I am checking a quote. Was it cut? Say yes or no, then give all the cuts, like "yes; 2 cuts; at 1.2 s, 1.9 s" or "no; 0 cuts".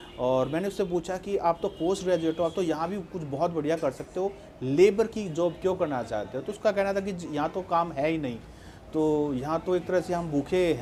no; 0 cuts